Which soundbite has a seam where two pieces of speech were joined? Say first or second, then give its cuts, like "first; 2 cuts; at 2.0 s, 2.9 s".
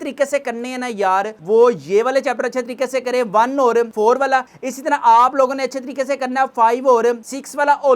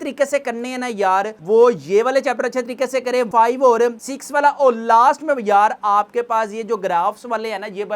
second; 1 cut; at 3.3 s